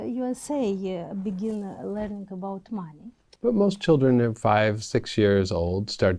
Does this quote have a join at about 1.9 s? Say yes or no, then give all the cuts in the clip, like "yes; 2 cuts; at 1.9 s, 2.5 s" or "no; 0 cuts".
no; 1 cut; at 3.2 s